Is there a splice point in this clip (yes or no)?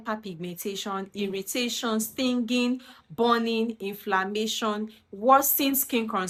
no